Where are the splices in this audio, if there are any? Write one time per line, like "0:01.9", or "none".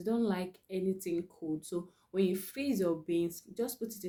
none